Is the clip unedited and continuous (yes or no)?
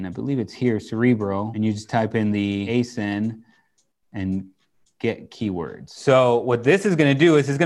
no